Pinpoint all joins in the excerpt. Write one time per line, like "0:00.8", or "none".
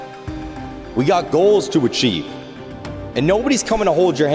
0:00.9